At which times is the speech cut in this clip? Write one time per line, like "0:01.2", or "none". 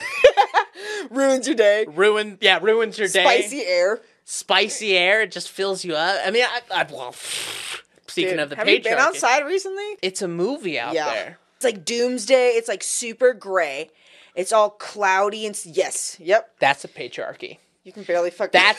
0:09.9
0:11.6
0:16.5